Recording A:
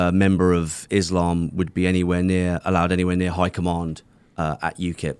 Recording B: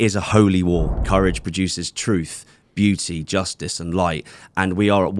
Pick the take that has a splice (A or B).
B